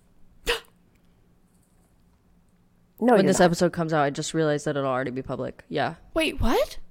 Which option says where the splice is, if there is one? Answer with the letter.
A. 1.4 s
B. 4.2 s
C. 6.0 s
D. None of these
C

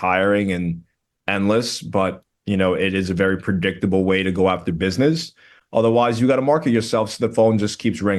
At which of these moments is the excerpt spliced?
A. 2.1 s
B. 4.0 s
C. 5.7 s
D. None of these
D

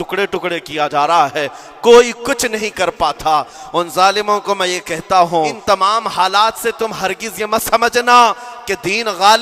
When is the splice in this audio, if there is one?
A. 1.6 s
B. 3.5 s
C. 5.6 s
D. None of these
C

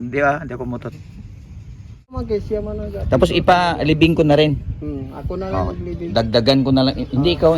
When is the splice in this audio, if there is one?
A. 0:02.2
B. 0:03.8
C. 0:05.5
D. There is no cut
A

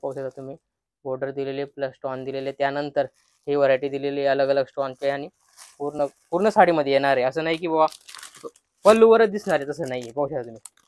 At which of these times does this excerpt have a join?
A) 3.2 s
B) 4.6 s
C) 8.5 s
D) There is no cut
D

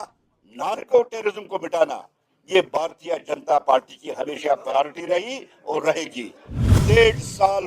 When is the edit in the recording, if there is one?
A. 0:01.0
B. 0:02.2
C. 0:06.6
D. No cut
C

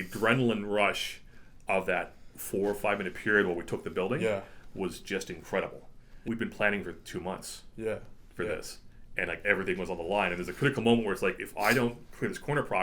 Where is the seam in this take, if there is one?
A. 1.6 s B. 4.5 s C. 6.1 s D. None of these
C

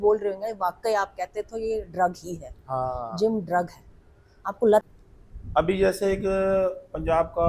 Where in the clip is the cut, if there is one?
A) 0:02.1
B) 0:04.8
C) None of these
B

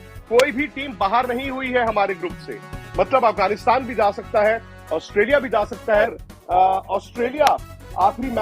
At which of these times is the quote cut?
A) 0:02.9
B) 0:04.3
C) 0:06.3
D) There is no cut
C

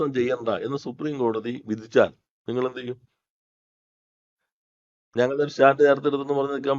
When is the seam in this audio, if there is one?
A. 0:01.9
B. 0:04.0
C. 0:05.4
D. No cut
D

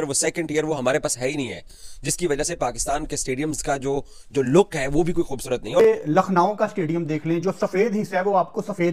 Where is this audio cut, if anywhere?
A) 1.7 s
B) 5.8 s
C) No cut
B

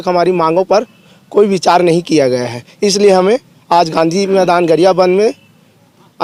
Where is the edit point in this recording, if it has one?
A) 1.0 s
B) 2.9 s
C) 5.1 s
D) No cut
D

